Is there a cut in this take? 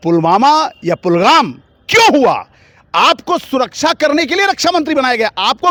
no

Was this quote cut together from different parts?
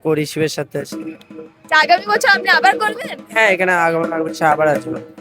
no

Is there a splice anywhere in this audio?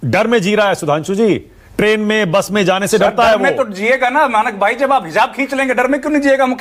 no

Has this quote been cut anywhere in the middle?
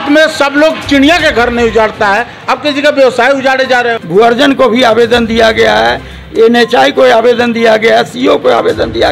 yes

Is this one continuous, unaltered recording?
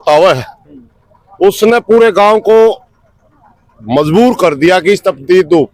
yes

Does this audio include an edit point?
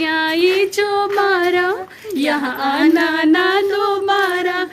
no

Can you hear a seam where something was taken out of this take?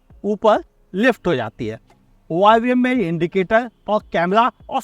no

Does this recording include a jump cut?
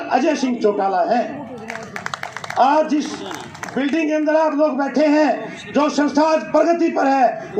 no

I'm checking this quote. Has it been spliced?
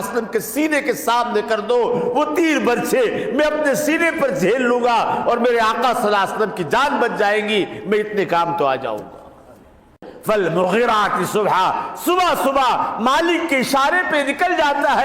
yes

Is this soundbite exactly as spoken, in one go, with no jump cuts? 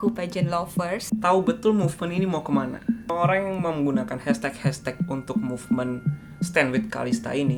yes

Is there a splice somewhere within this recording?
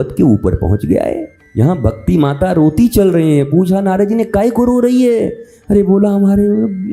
yes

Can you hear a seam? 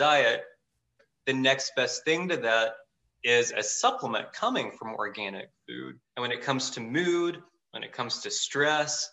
yes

